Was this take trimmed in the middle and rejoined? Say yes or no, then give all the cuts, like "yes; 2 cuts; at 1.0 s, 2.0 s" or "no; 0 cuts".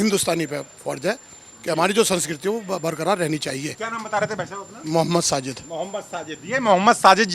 no; 0 cuts